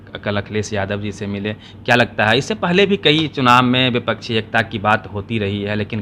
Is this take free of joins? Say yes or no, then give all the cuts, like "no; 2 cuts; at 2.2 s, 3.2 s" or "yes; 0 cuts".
yes; 0 cuts